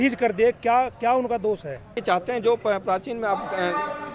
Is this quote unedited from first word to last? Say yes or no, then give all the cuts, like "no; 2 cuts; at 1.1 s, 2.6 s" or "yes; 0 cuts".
no; 1 cut; at 1.9 s